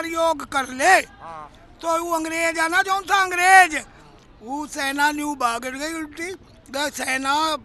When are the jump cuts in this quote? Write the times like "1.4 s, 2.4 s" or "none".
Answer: none